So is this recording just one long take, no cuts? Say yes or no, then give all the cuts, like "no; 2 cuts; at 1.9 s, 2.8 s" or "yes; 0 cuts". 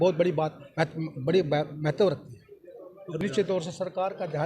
yes; 0 cuts